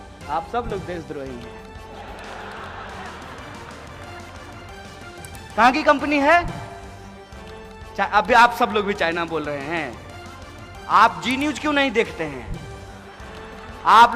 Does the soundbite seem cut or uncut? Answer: uncut